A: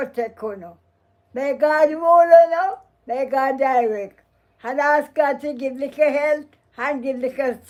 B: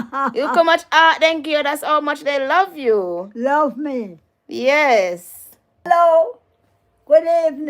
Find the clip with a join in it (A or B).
B